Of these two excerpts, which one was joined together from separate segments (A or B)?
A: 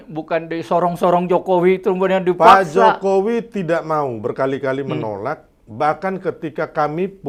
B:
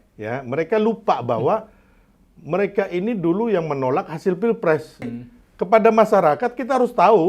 B